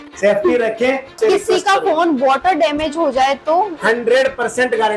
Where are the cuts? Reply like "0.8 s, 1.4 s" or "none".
1.1 s

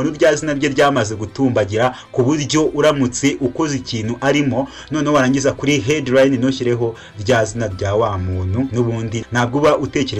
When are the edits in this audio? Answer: 8.7 s

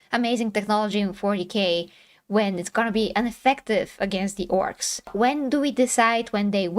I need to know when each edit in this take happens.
none

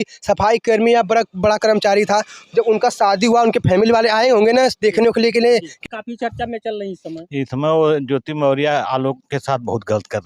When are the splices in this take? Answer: 5.8 s

